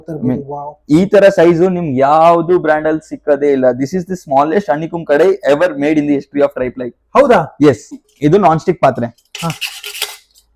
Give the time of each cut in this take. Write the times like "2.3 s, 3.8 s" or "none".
8.0 s